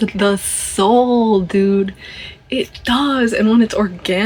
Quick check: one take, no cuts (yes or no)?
yes